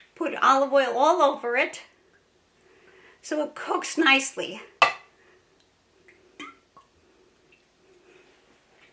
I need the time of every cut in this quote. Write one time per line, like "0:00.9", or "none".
none